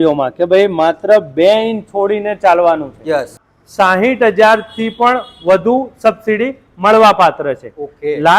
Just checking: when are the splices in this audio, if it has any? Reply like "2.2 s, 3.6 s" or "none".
3.5 s

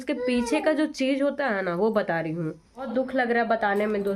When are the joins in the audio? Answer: 2.9 s

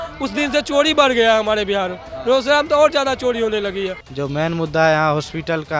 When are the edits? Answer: 4.0 s

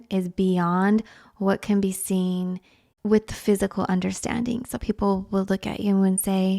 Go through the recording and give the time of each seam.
2.9 s

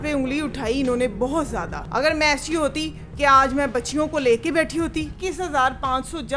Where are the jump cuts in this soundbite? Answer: 1.8 s, 5.1 s

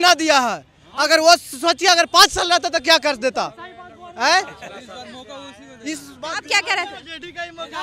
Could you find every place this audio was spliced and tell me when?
none

